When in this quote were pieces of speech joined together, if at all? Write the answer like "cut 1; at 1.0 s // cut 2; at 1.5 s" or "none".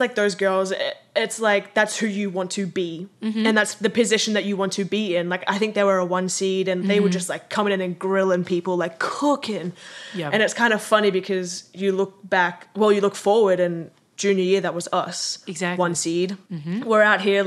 cut 1; at 16.5 s